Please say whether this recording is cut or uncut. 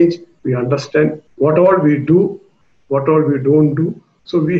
cut